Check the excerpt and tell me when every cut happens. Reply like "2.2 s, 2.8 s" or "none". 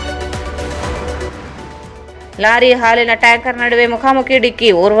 1.1 s